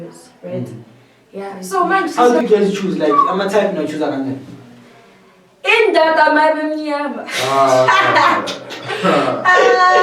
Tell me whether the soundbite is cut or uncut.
cut